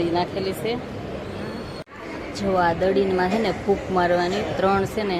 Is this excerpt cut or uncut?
cut